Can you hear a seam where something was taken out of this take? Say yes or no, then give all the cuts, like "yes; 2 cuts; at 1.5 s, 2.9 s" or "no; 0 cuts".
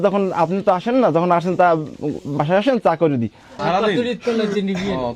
yes; 1 cut; at 3.6 s